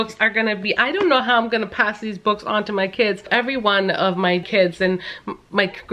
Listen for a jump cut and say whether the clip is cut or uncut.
cut